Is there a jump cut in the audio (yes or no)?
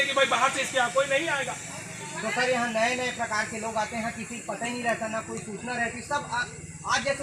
no